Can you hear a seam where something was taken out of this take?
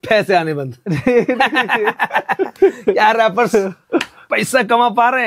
no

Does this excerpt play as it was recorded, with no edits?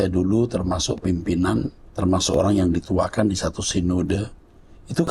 no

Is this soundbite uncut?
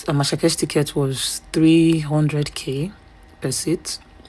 yes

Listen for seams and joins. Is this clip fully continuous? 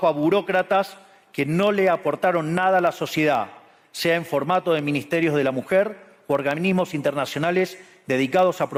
yes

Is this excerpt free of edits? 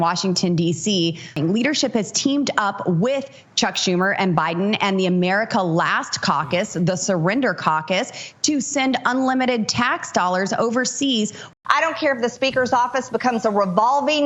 no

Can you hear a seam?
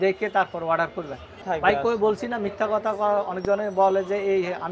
yes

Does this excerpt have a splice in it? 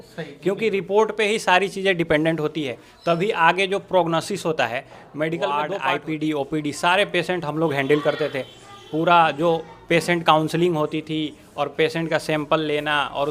yes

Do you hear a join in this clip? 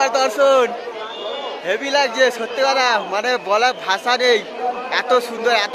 no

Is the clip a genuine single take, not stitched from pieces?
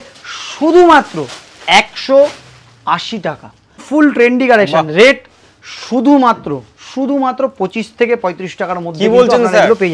no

